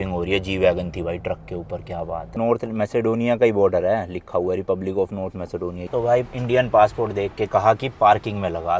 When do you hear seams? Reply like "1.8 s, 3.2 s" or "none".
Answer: 2.4 s, 5.9 s

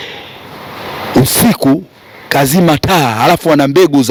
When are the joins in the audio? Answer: none

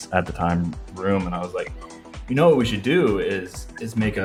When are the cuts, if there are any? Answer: none

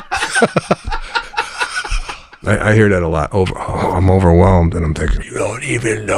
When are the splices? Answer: 2.3 s, 5.2 s

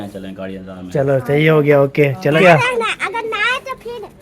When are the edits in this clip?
2.4 s

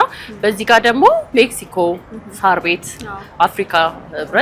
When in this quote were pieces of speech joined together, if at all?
none

